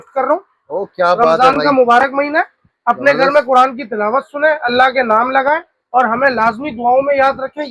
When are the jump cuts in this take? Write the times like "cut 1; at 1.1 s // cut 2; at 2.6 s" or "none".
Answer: none